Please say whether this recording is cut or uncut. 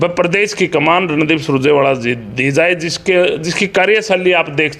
uncut